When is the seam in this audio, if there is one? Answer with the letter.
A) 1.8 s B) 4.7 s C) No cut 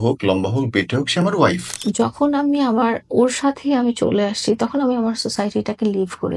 A